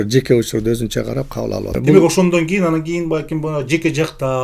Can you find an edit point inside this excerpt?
yes; 1 cut; at 1.8 s

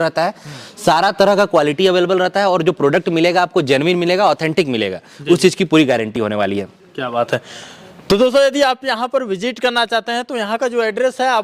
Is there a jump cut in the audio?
no; 0 cuts

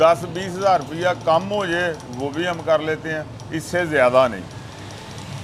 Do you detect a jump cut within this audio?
no; 0 cuts

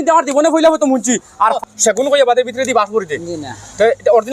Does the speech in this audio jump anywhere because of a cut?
yes; 1 cut; at 1.5 s

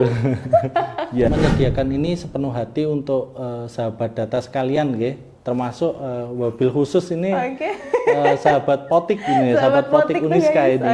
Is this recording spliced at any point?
yes; 1 cut; at 1.3 s

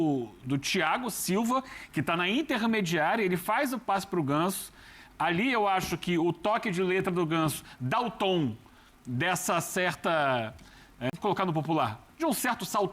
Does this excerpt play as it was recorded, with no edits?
no; 1 cut; at 11.1 s

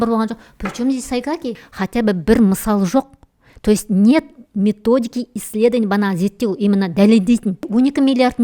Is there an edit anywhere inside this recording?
yes; 2 cuts; at 1.6 s, 7.7 s

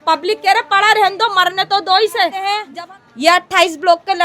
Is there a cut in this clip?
yes; 1 cut; at 2.6 s

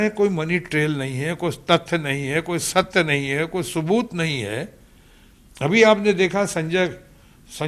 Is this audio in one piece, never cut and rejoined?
yes; 0 cuts

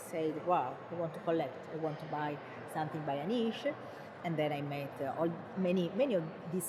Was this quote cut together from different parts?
no; 0 cuts

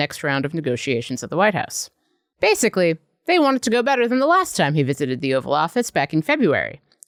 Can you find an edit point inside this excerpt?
no; 0 cuts

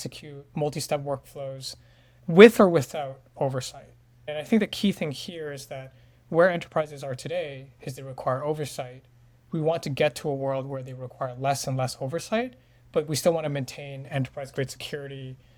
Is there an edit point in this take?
no; 0 cuts

